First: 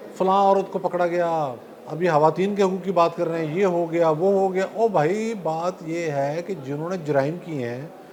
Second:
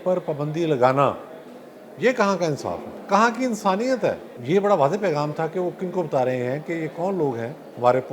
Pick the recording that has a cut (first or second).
second